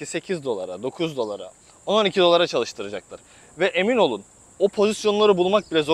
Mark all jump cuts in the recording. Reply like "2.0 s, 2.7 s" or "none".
none

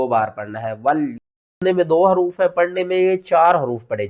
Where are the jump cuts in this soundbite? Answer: 1.4 s

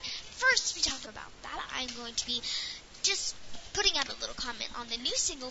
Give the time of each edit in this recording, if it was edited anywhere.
1.0 s

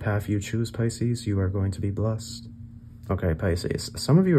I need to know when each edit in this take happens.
3.1 s

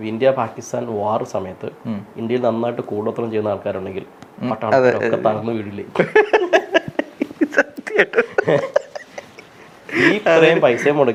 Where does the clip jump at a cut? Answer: none

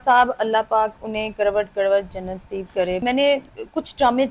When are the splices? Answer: 3.0 s

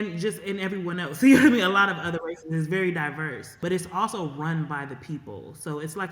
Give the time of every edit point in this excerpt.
3.4 s

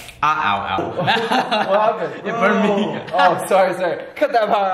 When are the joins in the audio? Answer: none

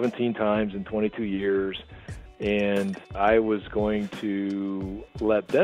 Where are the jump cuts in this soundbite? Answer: 3.2 s

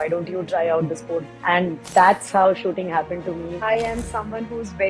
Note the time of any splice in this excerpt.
1.3 s, 3.6 s

